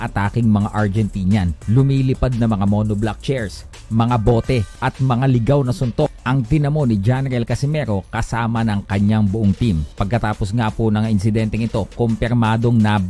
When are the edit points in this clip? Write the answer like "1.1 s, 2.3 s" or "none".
1.6 s, 4.7 s, 6.2 s, 9.9 s, 10.9 s